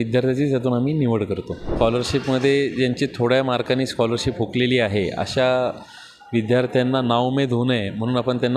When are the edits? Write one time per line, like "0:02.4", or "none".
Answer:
0:01.7